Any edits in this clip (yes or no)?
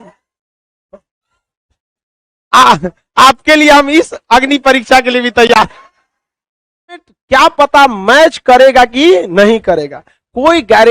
yes